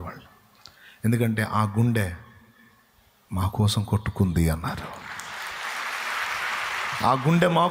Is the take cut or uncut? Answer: uncut